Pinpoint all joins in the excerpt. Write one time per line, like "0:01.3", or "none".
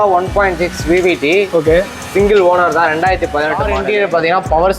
0:03.7